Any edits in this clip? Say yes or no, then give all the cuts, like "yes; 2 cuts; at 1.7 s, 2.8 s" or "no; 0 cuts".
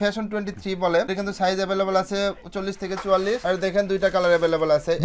no; 0 cuts